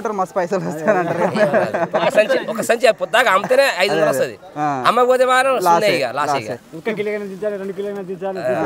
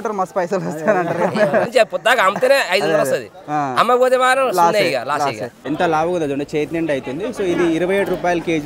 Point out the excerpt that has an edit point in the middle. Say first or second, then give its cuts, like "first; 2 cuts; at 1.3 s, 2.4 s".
second; 2 cuts; at 1.7 s, 5.5 s